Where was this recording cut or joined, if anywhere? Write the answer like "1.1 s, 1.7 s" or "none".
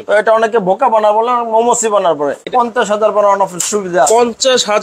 2.4 s